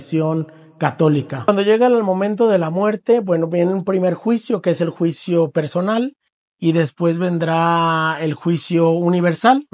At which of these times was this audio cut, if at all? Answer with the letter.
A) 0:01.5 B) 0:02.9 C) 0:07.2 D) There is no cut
A